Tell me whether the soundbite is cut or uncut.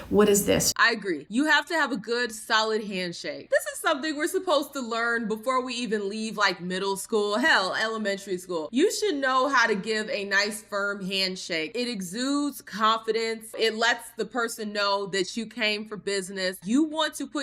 uncut